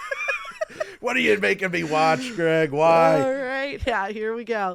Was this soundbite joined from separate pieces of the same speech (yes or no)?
yes